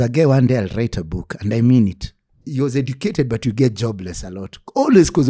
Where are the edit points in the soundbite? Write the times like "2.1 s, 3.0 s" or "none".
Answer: 2.4 s